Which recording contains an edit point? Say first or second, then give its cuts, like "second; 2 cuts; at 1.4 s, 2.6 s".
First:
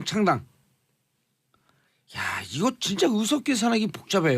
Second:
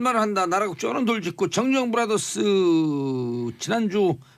first; 1 cut; at 1.5 s